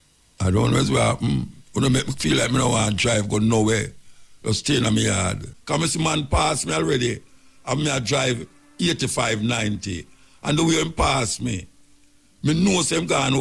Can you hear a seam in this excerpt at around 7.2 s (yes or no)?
no